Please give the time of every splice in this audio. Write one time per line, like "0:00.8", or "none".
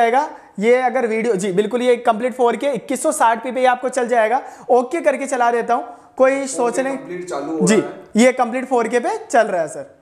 none